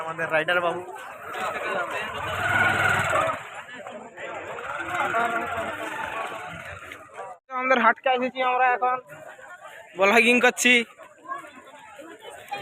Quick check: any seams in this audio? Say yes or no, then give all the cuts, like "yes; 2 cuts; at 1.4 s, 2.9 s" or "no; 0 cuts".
no; 0 cuts